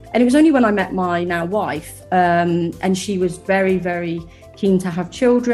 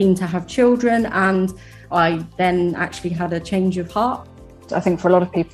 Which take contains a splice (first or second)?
second